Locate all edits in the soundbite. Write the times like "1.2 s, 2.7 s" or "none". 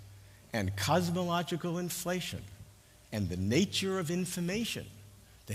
none